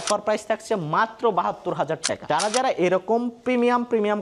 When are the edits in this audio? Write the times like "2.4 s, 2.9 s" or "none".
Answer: 2.2 s